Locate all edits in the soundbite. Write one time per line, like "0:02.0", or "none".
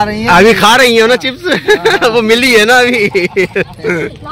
none